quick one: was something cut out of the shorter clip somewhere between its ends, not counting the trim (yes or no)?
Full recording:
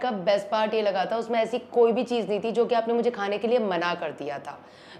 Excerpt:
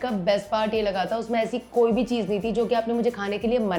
no